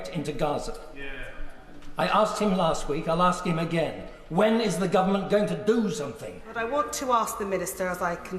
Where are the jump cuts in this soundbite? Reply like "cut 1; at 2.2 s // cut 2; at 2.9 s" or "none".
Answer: cut 1; at 6.5 s